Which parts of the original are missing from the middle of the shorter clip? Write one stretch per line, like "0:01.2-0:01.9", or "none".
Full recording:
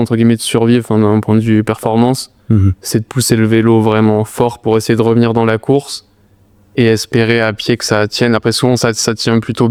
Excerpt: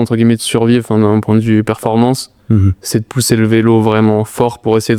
none